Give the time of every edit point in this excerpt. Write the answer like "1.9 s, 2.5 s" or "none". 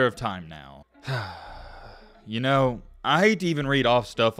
none